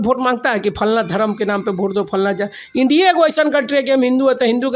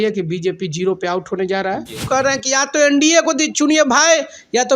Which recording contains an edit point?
second; 1 cut; at 2.1 s

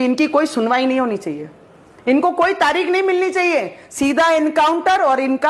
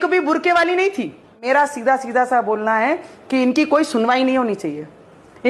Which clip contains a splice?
second; 1 cut; at 1.4 s

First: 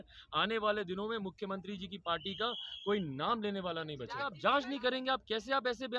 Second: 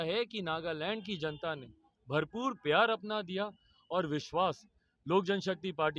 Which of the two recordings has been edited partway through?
first; 1 cut; at 4.3 s

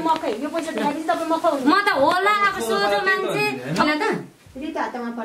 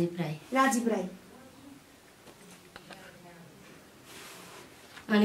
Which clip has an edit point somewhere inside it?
first; 1 cut; at 3.9 s

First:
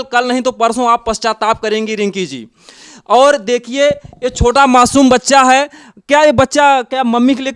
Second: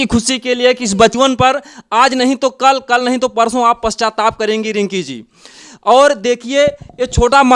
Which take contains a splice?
second; 1 cut; at 1.1 s

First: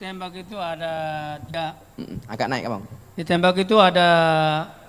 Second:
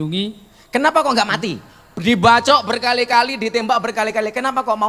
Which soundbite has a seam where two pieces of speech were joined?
first; 1 cut; at 1.4 s

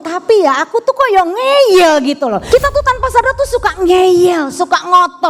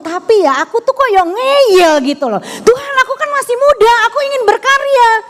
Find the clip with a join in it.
first; 1 cut; at 2.4 s

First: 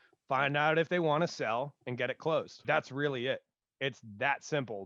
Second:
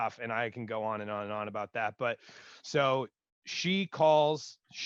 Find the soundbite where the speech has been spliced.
first; 1 cut; at 2.5 s

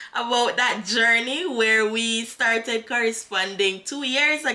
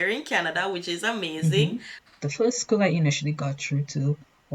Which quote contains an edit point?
second; 1 cut; at 1.9 s

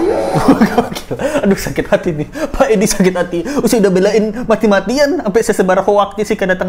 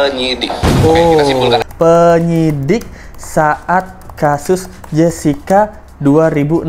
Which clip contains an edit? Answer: second; 1 cut; at 1.6 s

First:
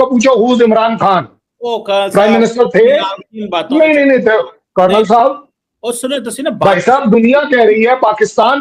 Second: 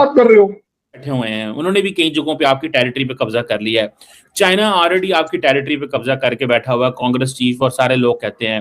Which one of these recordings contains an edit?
second; 1 cut; at 1.0 s

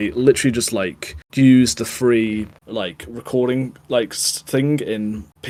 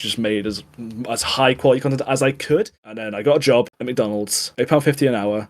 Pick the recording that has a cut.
second; 1 cut; at 2.8 s

